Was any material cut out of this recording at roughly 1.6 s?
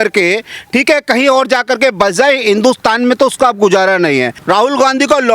no; 1 cut; at 4.4 s

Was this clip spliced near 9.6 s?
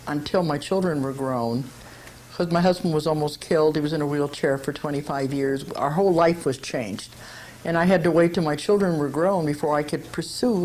no; 0 cuts

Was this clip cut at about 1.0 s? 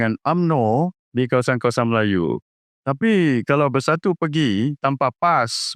yes; 2 cuts; at 1.0 s, 2.6 s

